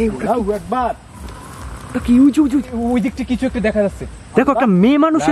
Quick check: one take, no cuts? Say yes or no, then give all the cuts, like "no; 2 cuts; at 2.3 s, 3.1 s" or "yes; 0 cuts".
yes; 0 cuts